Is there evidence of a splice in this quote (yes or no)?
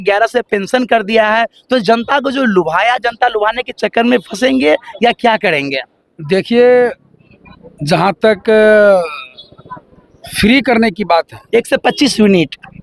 no